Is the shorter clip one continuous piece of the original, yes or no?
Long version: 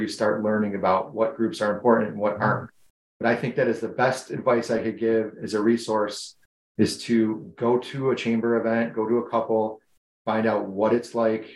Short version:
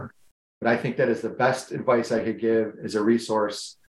yes